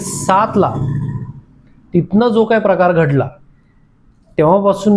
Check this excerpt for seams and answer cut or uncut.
uncut